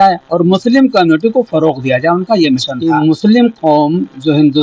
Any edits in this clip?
yes; 1 cut; at 2.8 s

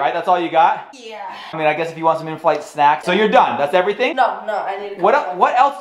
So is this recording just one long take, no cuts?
no; 3 cuts; at 1.5 s, 3.0 s, 4.1 s

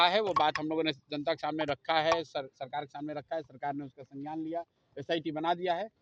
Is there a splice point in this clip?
no; 0 cuts

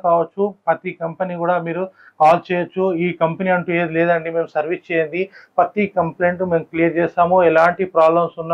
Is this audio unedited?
yes; 0 cuts

